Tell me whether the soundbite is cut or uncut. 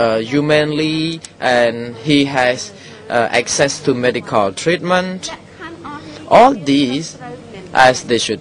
cut